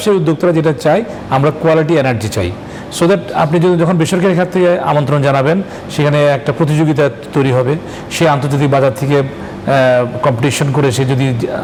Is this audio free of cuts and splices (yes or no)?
yes